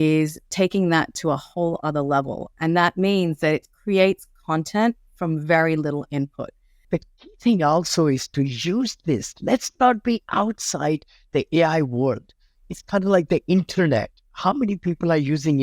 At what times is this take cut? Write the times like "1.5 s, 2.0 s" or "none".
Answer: 6.7 s